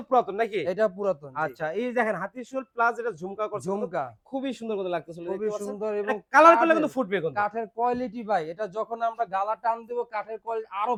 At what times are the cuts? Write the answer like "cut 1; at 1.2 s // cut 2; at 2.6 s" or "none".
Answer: none